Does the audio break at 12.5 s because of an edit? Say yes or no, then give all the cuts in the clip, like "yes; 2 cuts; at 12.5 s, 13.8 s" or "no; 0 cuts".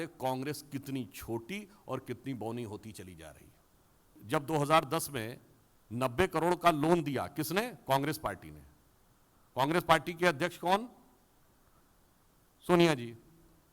no; 1 cut; at 4.2 s